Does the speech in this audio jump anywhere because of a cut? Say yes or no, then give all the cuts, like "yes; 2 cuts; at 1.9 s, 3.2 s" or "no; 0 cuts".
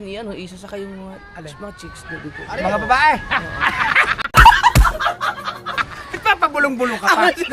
no; 0 cuts